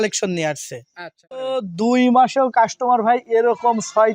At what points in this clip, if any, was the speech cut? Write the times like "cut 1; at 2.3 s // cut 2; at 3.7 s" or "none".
cut 1; at 1.4 s